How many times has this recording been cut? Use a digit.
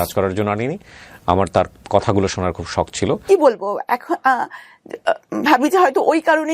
1